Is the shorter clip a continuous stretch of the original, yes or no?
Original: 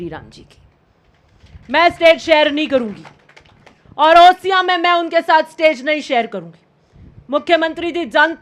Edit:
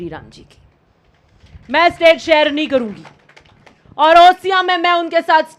yes